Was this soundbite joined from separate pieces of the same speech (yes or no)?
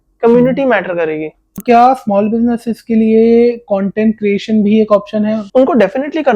yes